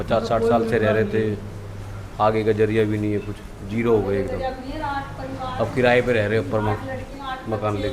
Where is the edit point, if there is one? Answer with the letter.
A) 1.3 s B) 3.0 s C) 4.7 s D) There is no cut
D